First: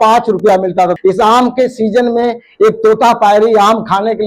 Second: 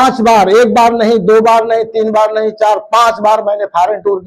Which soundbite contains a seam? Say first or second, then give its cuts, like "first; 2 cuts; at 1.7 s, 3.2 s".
first; 1 cut; at 1.0 s